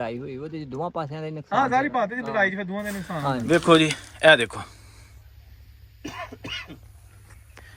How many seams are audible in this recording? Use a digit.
1